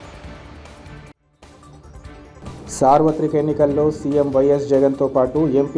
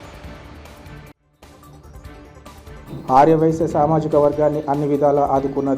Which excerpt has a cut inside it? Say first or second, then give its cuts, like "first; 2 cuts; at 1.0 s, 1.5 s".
first; 1 cut; at 2.4 s